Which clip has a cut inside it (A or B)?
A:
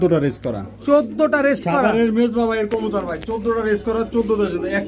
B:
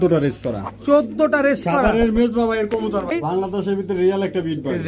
B